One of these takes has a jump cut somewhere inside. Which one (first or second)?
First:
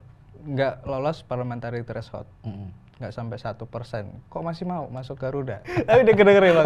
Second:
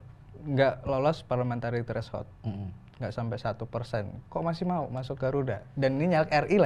first